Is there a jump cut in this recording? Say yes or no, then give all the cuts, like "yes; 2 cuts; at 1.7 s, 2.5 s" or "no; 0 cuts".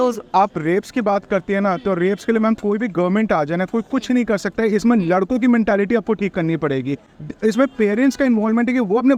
no; 0 cuts